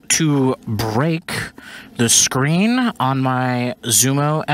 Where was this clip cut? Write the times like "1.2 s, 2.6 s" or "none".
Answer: none